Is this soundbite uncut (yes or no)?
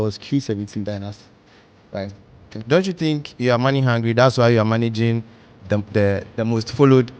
no